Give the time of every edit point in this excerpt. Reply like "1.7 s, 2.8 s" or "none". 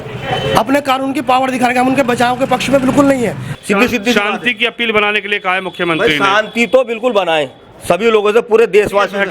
3.5 s